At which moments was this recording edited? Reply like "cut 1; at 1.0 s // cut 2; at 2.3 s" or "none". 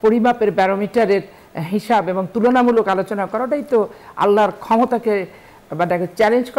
none